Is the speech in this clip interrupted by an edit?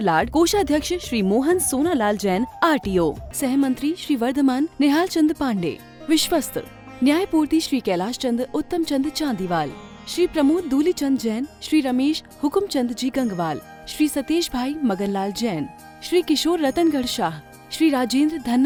no; 0 cuts

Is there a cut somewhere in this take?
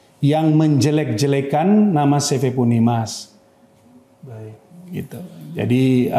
no; 0 cuts

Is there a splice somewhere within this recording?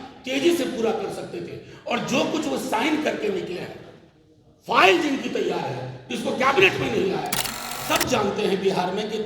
yes; 1 cut; at 7.8 s

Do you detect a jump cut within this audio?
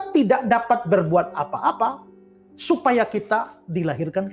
no; 0 cuts

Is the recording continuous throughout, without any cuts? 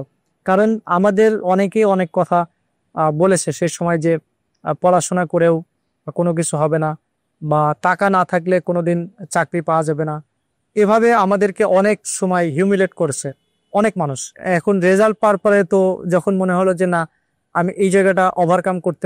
no; 2 cuts; at 1.5 s, 14.4 s

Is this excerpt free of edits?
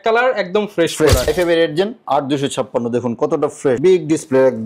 no; 2 cuts; at 1.3 s, 3.8 s

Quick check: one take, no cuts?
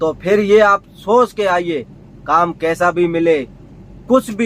yes; 0 cuts

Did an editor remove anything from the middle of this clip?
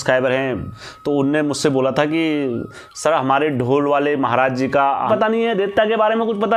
yes; 1 cut; at 5.1 s

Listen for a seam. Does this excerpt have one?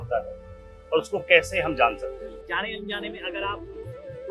yes; 1 cut; at 2.2 s

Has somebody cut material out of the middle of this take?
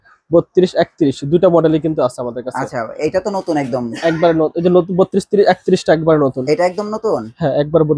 no; 0 cuts

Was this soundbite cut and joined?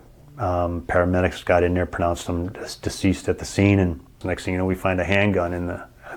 yes; 1 cut; at 4.1 s

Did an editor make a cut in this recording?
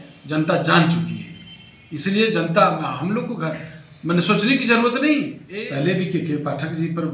yes; 1 cut; at 5.4 s

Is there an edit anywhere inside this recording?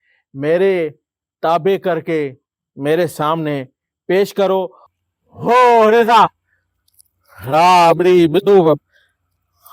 yes; 1 cut; at 4.8 s

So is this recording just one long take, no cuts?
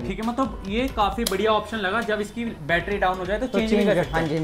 yes; 0 cuts

